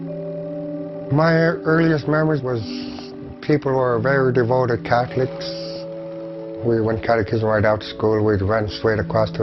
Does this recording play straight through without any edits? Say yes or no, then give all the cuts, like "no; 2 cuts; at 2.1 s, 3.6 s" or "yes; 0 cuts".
no; 1 cut; at 6.4 s